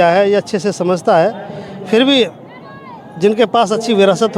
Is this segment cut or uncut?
uncut